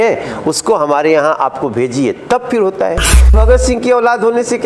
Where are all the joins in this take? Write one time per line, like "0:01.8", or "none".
0:03.4